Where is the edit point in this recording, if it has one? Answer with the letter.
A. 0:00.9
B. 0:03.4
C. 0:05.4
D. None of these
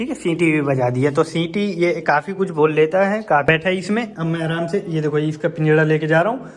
B